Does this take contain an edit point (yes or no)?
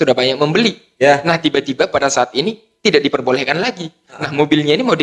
no